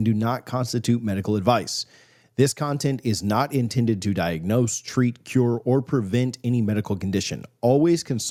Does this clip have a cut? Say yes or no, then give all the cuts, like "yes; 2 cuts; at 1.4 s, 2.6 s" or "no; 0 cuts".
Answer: no; 0 cuts